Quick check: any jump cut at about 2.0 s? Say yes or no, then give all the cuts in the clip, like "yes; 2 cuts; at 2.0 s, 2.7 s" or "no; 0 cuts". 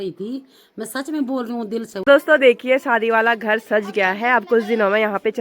yes; 1 cut; at 2.0 s